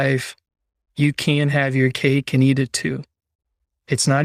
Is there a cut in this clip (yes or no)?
no